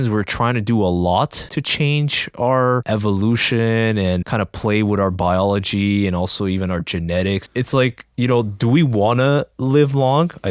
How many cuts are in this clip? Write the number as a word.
four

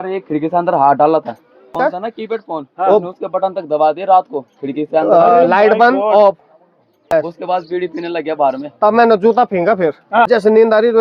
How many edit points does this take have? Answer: three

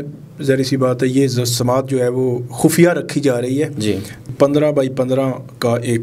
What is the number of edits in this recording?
one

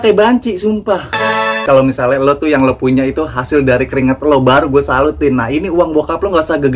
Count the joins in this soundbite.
one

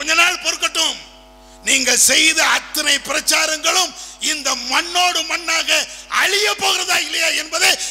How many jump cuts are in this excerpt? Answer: zero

